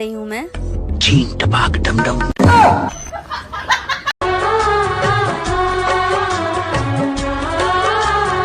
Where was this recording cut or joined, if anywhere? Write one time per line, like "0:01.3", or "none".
0:04.1

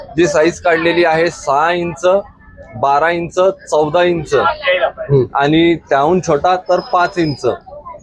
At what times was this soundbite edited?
none

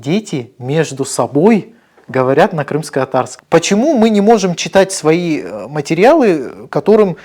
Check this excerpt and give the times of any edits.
0:03.3

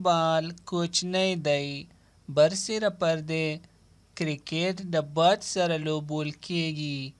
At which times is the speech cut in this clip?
0:01.8

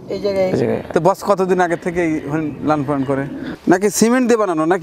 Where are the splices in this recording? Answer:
0:03.4

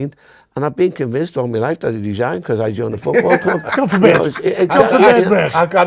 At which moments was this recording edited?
none

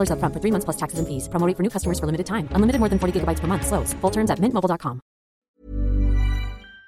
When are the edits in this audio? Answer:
0:05.5

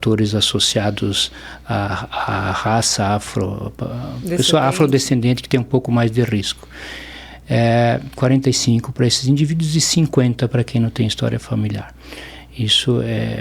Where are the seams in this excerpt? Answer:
none

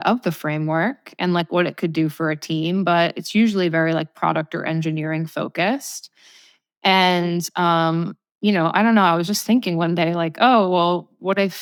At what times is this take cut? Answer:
none

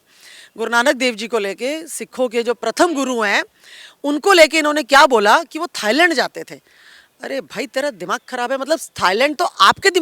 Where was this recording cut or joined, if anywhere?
none

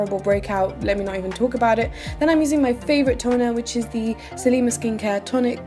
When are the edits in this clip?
0:01.2

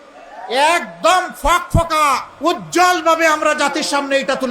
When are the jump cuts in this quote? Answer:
0:02.3

